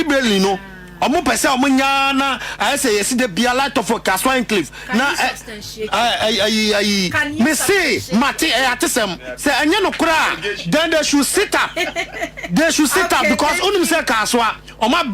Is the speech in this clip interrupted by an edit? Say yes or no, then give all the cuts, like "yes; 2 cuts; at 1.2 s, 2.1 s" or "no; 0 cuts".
no; 0 cuts